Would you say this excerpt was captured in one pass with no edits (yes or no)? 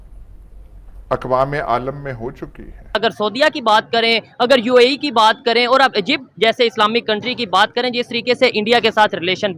no